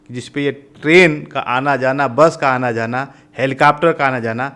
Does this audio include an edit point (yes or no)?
no